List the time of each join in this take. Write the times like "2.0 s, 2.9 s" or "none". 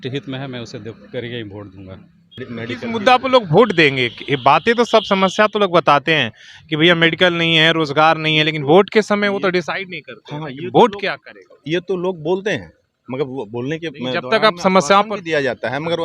2.4 s